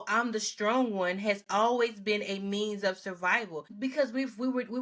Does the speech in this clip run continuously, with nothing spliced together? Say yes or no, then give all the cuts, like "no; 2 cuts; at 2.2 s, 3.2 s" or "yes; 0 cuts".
no; 1 cut; at 3.7 s